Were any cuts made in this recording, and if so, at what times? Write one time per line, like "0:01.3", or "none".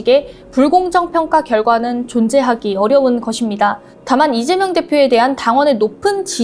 none

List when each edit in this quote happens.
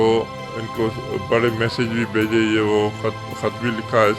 none

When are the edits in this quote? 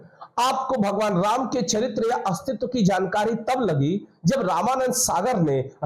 none

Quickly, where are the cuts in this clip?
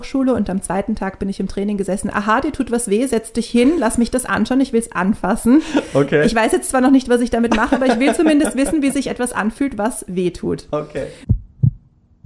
0:11.2

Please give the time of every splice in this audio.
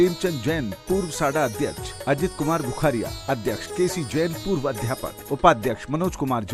none

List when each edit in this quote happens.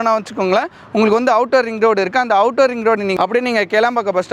0:03.3

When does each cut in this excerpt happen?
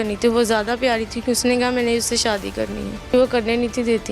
0:03.1

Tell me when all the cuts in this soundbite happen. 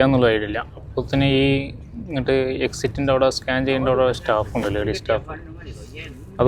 none

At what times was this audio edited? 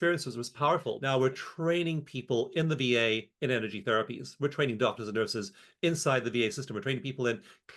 0:00.9

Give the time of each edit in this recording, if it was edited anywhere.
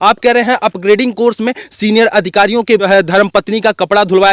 0:02.9

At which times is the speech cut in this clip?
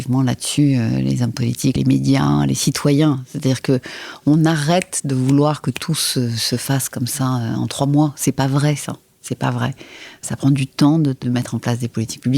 0:01.8
0:10.2
0:11.2

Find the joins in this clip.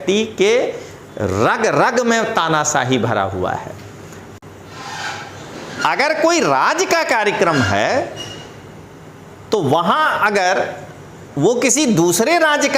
0:04.2

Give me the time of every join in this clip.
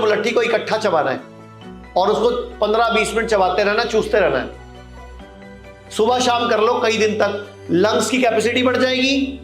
none

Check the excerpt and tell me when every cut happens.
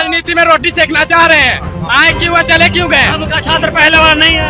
none

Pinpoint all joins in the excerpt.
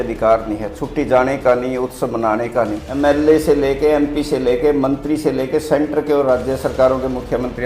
0:02.8

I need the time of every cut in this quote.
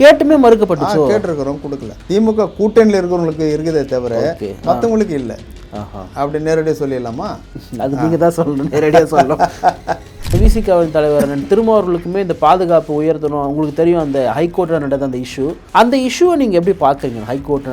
0:02.0
0:10.3
0:15.6

